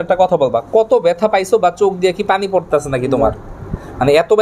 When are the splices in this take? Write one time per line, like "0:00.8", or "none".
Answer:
none